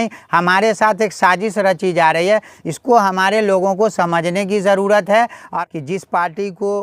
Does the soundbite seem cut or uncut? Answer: cut